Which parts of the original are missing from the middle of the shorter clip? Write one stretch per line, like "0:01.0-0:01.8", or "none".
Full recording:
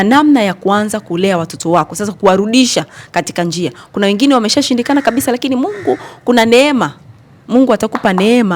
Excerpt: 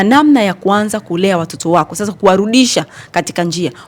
none